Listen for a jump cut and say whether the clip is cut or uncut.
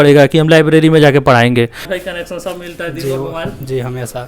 cut